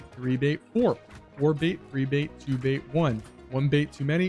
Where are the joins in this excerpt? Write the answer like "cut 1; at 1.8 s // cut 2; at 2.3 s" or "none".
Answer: none